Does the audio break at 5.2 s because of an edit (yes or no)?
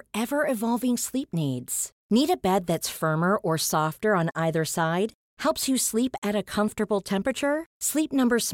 no